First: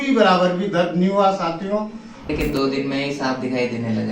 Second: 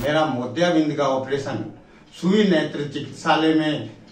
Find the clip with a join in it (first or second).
first